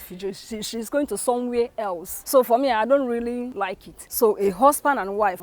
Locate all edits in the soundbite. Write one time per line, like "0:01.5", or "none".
none